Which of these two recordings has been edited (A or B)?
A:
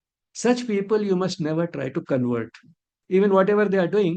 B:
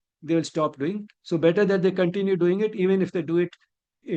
A